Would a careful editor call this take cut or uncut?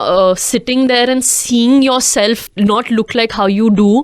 cut